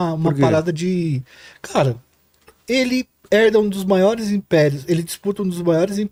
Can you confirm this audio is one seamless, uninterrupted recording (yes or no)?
yes